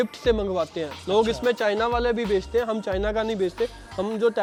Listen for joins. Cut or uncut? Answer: uncut